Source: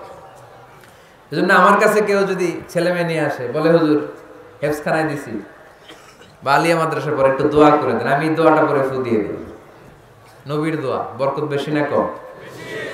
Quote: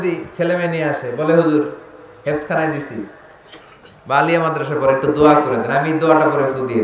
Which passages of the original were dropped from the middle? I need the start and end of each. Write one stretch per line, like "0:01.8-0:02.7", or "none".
none